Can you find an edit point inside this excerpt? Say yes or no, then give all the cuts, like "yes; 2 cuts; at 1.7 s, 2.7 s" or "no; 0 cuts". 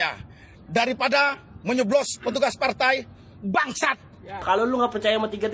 yes; 1 cut; at 4.4 s